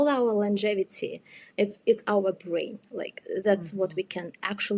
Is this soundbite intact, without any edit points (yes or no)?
yes